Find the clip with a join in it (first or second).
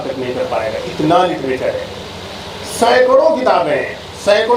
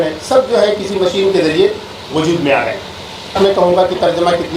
second